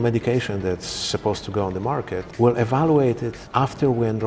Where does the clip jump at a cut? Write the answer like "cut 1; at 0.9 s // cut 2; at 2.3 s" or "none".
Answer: cut 1; at 2.3 s // cut 2; at 3.4 s